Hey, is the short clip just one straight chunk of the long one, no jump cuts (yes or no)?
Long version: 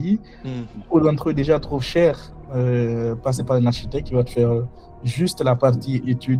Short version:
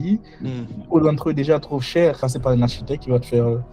no